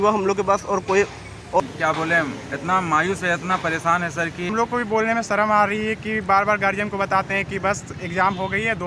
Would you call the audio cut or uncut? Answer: cut